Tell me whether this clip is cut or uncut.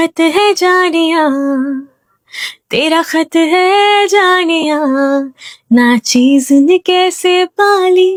uncut